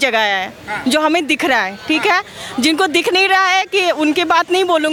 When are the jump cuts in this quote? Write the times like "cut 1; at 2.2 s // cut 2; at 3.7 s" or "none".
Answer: none